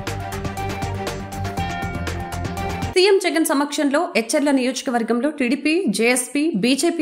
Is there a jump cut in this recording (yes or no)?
yes